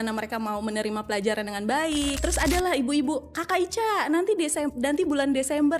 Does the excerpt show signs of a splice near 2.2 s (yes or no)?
yes